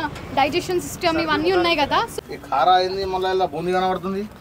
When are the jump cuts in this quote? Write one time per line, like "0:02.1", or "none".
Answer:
0:02.2